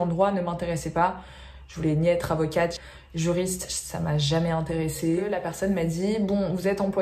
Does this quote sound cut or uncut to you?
cut